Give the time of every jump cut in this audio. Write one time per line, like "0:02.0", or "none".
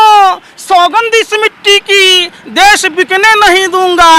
none